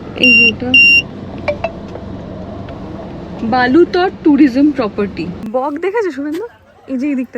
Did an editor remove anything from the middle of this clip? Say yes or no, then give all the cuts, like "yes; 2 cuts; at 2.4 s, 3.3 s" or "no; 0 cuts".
yes; 1 cut; at 5.4 s